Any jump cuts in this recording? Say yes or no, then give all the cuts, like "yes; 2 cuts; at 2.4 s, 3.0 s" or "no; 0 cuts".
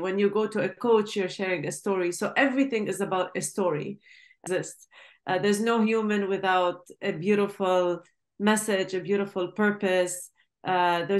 yes; 1 cut; at 4.4 s